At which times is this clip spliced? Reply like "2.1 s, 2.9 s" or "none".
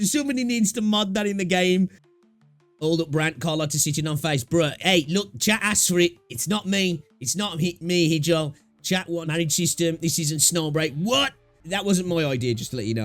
2.0 s, 9.1 s